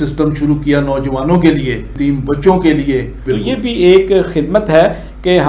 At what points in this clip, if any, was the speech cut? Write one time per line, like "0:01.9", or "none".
0:01.9
0:03.2